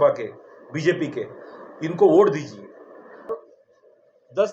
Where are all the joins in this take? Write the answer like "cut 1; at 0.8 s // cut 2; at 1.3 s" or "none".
cut 1; at 3.3 s

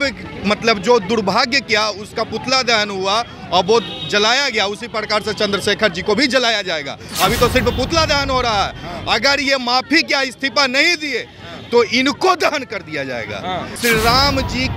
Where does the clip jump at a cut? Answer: cut 1; at 13.8 s

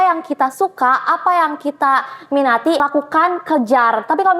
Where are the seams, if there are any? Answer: cut 1; at 2.8 s

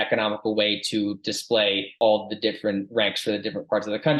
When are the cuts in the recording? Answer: cut 1; at 1.9 s

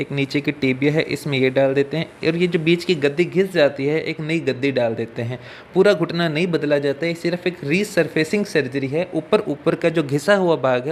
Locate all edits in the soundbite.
none

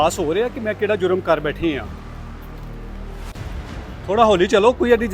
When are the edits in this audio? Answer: cut 1; at 1.8 s // cut 2; at 3.3 s

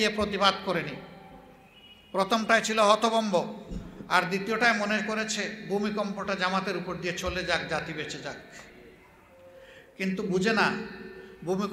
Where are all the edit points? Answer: none

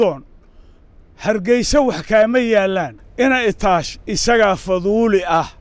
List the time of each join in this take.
cut 1; at 3.0 s

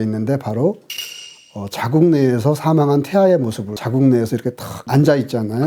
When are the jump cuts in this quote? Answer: cut 1; at 3.8 s // cut 2; at 4.7 s

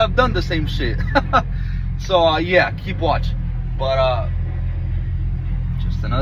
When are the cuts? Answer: none

